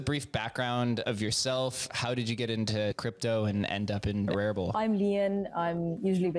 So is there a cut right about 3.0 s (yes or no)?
yes